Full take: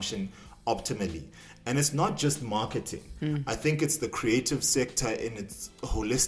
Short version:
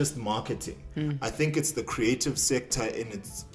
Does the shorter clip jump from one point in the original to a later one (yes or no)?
no